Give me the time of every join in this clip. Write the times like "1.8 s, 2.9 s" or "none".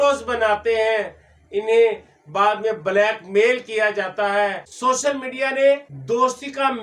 4.6 s, 5.9 s

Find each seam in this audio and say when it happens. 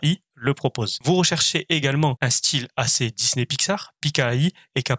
0.9 s, 2.2 s

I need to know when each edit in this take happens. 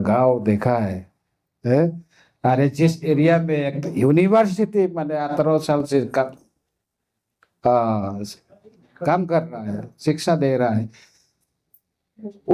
none

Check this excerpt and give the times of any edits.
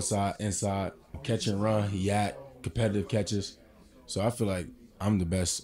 1.2 s

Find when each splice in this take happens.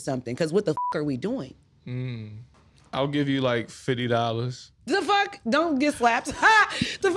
2.4 s

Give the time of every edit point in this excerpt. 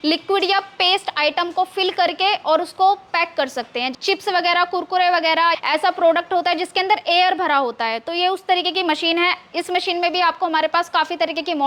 3.9 s, 5.6 s

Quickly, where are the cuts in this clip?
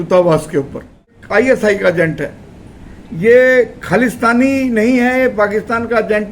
1.2 s

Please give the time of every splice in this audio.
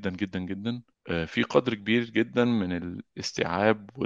0.9 s

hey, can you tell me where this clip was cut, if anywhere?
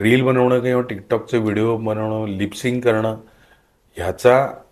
none

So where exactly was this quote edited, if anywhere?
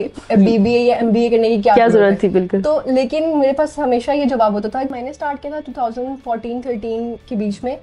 4.9 s

